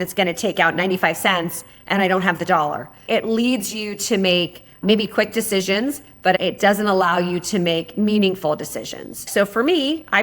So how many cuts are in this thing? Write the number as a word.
three